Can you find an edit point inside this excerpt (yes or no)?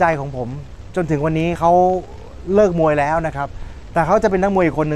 no